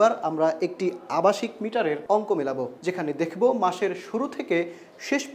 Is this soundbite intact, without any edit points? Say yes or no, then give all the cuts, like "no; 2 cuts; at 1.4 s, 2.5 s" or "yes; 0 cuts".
no; 2 cuts; at 2.0 s, 2.7 s